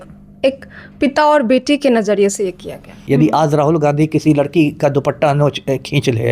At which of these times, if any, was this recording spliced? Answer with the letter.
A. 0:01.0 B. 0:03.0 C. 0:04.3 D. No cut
B